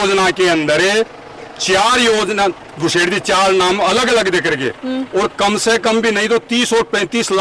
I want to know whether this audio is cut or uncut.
uncut